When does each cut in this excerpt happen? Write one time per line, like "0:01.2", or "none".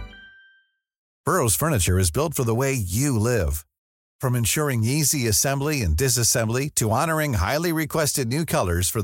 0:01.0